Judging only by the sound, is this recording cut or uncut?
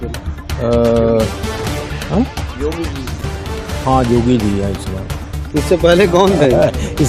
uncut